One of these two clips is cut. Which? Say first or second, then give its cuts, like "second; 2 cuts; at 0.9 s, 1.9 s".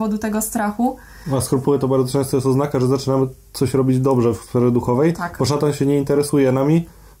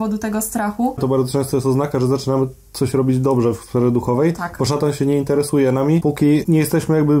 second; 2 cuts; at 1.0 s, 6.2 s